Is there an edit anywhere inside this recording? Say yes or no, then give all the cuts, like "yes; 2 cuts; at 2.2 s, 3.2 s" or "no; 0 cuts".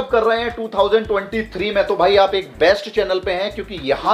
no; 0 cuts